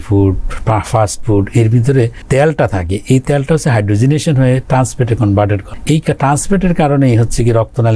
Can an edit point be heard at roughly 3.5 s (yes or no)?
no